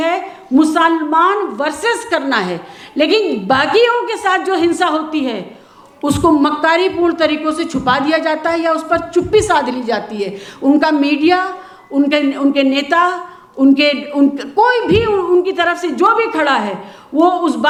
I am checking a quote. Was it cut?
no; 0 cuts

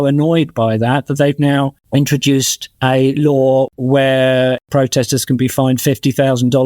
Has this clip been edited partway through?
yes; 4 cuts; at 1.8 s, 2.6 s, 3.7 s, 4.7 s

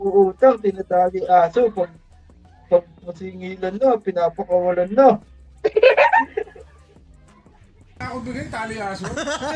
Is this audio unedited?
yes; 0 cuts

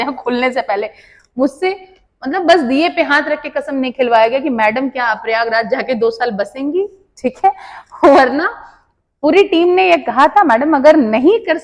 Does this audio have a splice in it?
no; 0 cuts

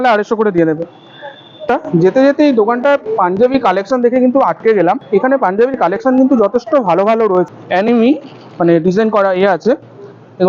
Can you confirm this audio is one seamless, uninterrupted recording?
no; 3 cuts; at 1.7 s, 5.0 s, 7.5 s

